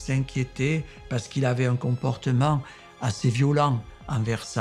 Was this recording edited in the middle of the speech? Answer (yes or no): no